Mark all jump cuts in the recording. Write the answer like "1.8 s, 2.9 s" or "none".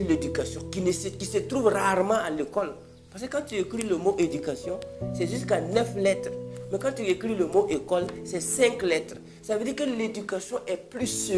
none